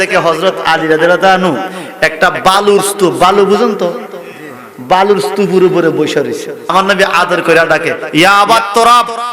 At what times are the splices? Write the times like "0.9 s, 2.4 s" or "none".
6.7 s